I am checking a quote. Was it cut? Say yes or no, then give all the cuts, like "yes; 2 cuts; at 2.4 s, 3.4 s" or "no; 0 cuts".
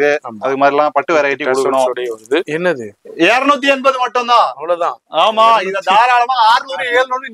yes; 1 cut; at 2.5 s